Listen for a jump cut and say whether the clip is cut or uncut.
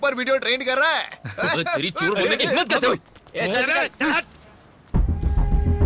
uncut